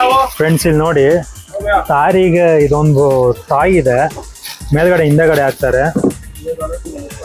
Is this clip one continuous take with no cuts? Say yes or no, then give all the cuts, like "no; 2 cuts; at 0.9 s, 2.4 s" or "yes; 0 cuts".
yes; 0 cuts